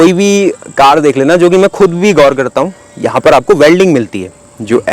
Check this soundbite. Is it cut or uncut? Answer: uncut